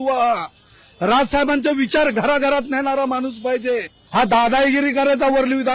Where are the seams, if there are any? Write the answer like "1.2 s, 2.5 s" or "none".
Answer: 4.0 s